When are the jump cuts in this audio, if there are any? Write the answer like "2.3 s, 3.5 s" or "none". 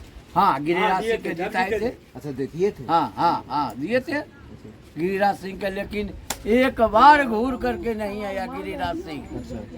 none